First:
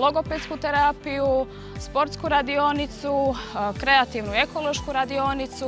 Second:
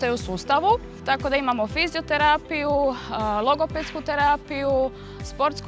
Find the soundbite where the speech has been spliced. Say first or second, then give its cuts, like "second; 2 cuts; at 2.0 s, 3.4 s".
second; 1 cut; at 0.9 s